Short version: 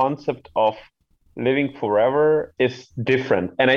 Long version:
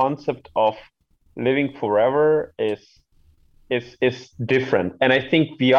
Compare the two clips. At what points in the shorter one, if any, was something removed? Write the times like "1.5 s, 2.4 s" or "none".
2.5 s